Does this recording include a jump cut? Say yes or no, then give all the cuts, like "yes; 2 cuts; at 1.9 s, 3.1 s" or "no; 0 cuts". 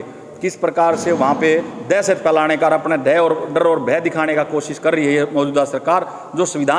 no; 0 cuts